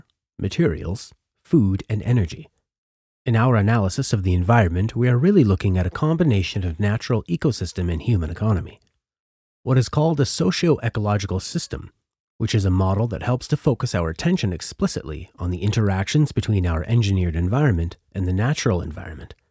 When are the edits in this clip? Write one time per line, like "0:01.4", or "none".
0:11.6